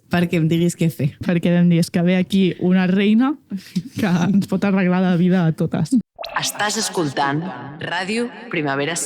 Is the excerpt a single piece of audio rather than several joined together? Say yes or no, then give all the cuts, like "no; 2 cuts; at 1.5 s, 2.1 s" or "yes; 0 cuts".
no; 2 cuts; at 1.2 s, 6.0 s